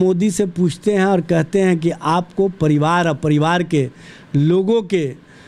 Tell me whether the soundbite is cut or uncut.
uncut